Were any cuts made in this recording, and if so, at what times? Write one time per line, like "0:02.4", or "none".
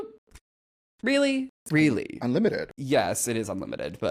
0:01.6
0:02.7